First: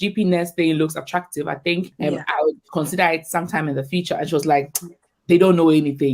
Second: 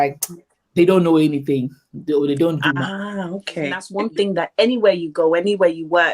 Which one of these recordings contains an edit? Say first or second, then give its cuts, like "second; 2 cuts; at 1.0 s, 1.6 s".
second; 1 cut; at 3.8 s